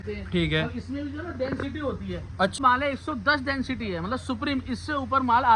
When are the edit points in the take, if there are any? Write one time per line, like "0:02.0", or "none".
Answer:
0:02.6